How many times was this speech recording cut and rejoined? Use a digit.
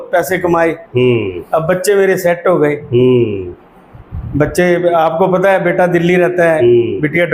0